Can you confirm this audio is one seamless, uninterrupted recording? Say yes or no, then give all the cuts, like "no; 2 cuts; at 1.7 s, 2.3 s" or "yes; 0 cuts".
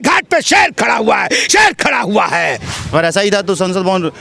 no; 1 cut; at 2.7 s